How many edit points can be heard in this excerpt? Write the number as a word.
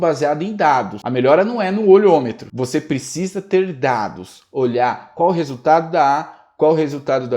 two